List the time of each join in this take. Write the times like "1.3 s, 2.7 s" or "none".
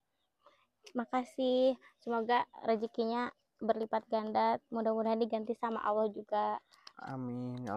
none

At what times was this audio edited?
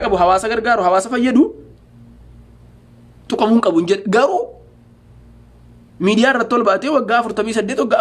none

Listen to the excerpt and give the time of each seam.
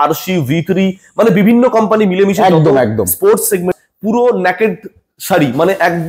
3.7 s

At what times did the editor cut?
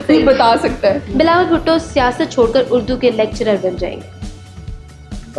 1.0 s

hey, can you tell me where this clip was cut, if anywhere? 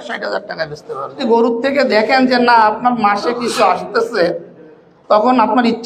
1.2 s

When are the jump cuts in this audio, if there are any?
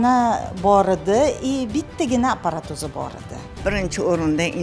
3.6 s

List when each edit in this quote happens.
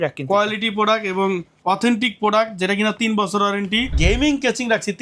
4.0 s

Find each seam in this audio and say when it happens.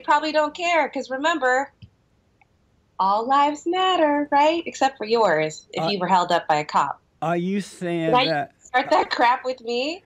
none

